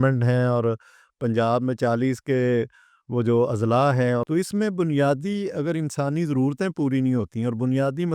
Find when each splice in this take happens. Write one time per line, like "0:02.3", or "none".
0:04.2